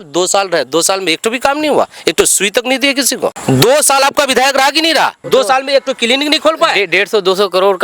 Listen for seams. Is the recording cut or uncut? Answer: cut